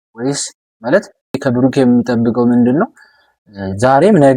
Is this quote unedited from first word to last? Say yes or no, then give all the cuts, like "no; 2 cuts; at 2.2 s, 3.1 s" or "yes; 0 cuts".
no; 1 cut; at 1.4 s